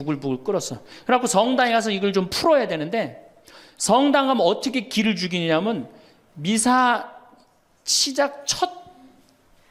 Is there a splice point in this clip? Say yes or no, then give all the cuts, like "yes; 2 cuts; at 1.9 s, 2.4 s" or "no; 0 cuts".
no; 0 cuts